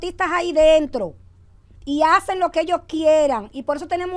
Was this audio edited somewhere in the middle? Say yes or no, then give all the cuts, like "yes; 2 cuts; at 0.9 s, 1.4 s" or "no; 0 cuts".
no; 0 cuts